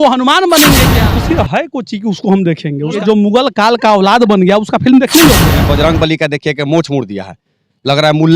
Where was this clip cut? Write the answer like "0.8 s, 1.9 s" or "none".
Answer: 1.0 s, 3.0 s, 5.6 s